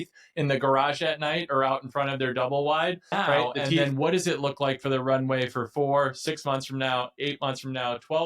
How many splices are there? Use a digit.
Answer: 1